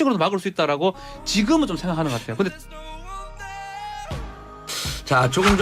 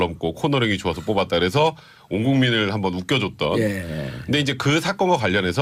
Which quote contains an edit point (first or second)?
first